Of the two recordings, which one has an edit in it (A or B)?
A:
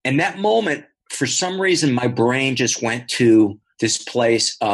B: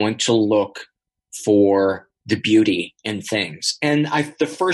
A